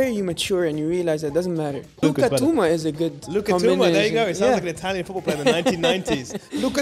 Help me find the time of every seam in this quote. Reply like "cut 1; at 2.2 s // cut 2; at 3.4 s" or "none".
cut 1; at 2.0 s